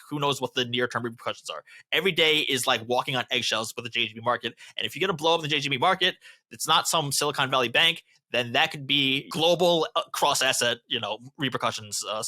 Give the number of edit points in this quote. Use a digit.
1